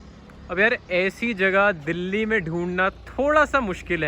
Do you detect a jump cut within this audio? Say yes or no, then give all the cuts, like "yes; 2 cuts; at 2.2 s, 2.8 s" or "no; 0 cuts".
no; 0 cuts